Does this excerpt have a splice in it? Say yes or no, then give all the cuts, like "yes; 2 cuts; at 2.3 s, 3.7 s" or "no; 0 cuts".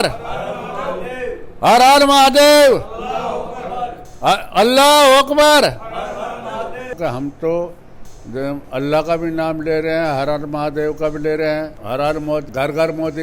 yes; 2 cuts; at 7.0 s, 12.0 s